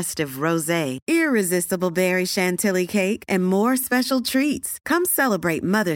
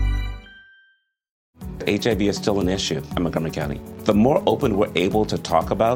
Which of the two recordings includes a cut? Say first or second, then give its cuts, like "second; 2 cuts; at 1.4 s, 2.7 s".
second; 1 cut; at 1.5 s